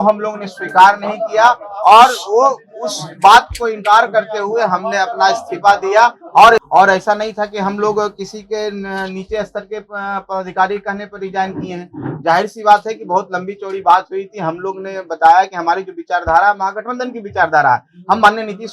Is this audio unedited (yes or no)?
no